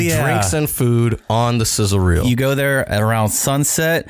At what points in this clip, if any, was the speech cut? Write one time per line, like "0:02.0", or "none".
0:02.2